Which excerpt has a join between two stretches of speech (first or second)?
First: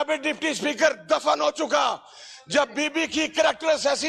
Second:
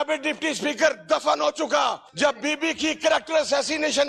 second